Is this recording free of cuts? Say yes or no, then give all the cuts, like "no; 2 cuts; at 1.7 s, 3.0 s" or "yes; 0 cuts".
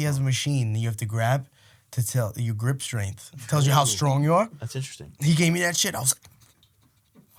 yes; 0 cuts